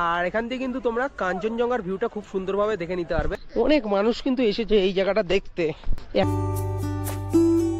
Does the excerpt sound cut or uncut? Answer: cut